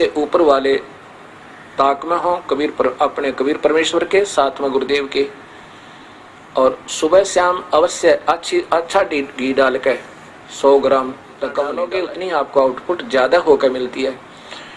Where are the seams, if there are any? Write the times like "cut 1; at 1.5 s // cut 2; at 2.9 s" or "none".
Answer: cut 1; at 11.8 s